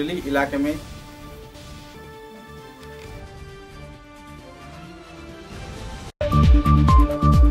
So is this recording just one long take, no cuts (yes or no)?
no